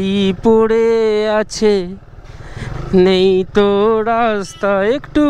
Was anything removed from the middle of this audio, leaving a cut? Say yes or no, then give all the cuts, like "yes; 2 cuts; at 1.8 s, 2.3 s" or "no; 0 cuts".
no; 0 cuts